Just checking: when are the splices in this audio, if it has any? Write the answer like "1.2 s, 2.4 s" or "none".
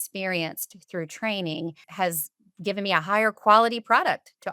1.8 s